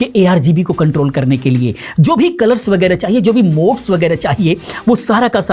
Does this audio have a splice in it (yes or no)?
no